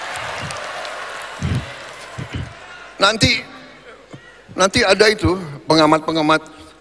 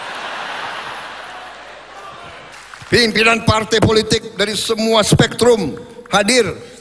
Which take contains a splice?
second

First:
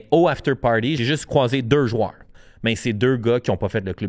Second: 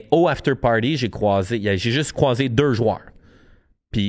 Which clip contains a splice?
first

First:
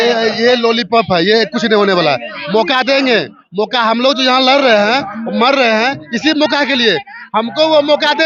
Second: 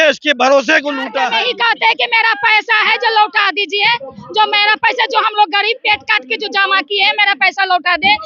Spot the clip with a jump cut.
second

